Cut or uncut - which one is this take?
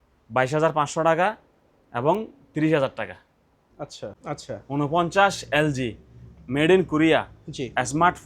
cut